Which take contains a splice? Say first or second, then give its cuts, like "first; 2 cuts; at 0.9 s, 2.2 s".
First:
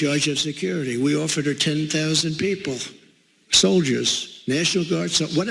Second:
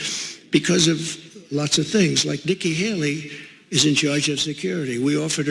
second; 1 cut; at 2.2 s